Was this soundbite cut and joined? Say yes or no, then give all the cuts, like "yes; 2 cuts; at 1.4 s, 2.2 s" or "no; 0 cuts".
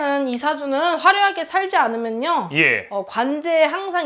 no; 0 cuts